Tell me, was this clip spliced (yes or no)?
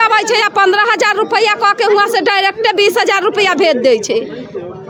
no